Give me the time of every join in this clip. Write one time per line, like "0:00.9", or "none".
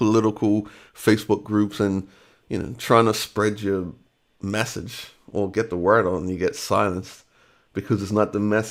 none